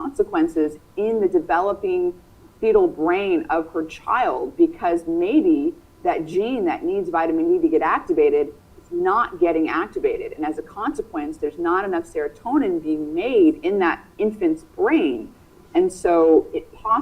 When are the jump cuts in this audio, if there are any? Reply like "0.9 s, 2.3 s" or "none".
none